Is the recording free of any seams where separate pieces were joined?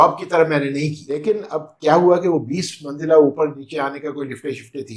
no; 1 cut; at 1.2 s

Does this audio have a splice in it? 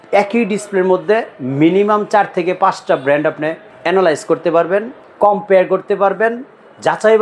yes; 2 cuts; at 3.7 s, 5.0 s

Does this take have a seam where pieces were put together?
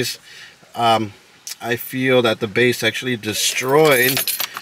no; 0 cuts

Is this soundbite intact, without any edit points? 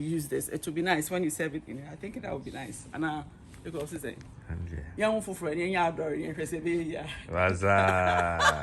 yes; 0 cuts

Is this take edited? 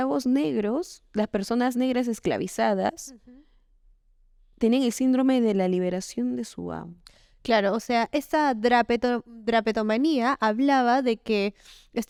no; 0 cuts

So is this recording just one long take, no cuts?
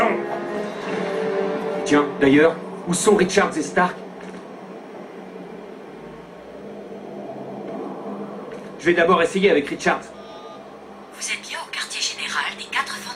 no; 1 cut; at 7.4 s

